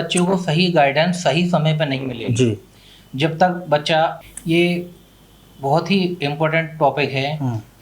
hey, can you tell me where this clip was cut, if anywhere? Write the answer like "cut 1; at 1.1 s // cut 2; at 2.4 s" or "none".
cut 1; at 4.2 s